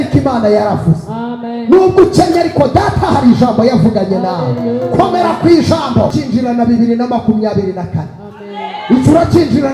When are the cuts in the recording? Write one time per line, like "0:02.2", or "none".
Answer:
0:06.1